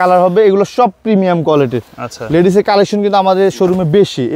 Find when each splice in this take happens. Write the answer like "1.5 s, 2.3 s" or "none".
none